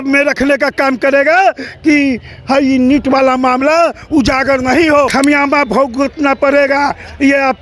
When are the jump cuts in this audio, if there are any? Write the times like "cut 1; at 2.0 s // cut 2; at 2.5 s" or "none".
cut 1; at 5.1 s